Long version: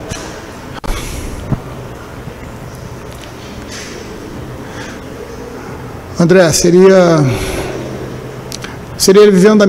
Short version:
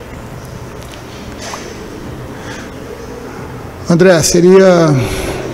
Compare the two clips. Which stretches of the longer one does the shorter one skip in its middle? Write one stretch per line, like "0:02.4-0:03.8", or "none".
none